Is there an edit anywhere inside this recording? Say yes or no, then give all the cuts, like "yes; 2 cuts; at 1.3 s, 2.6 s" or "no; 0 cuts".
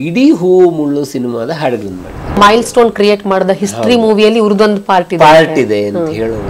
yes; 1 cut; at 2.4 s